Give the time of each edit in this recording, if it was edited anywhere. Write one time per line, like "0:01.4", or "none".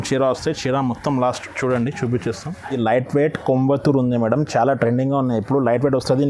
0:02.8